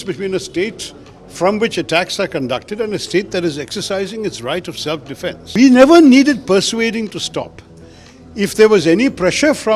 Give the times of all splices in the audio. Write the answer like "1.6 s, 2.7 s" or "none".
5.5 s